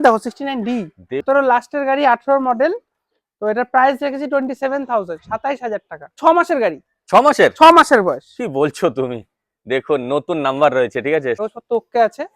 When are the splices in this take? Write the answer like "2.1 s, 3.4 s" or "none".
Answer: 1.2 s, 6.1 s, 11.4 s